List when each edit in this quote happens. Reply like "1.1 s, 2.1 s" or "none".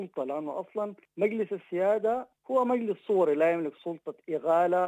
1.0 s, 2.3 s